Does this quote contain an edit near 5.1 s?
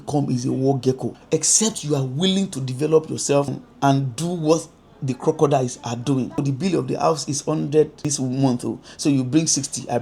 no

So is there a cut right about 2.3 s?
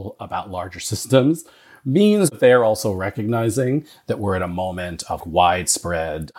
yes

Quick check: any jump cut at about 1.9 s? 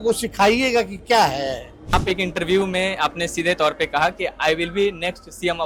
yes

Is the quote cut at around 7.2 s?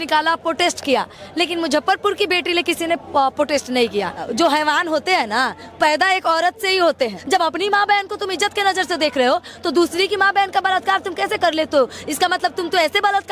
yes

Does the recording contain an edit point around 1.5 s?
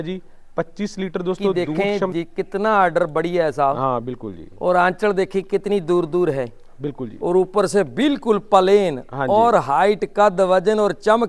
yes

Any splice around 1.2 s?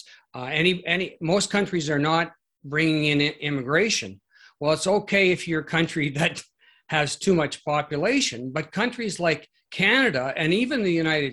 no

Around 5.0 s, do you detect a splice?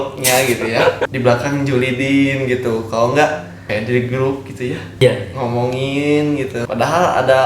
yes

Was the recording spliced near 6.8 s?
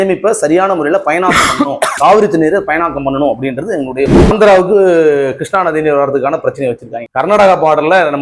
no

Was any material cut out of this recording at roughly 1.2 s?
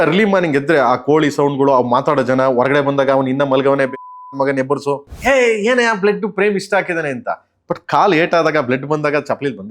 no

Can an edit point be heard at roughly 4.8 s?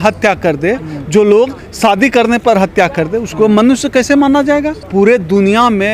yes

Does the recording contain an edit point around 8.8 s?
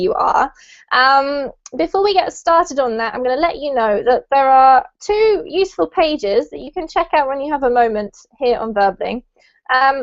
no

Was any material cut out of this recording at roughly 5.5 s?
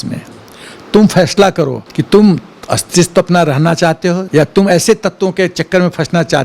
no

